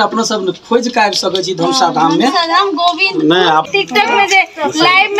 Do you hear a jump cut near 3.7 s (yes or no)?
yes